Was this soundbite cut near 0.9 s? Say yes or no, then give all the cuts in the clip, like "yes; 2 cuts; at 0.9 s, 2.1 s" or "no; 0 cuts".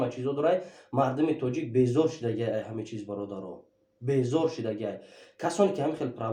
no; 0 cuts